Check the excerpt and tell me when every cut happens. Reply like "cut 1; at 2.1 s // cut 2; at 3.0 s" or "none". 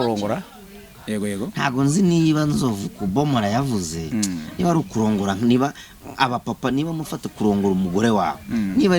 cut 1; at 0.9 s